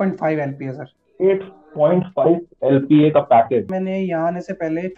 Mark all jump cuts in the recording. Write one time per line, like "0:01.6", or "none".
0:03.7